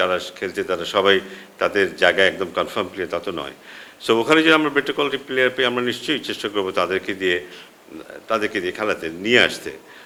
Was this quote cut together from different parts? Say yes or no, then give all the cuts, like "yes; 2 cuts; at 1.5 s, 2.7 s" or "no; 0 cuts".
no; 0 cuts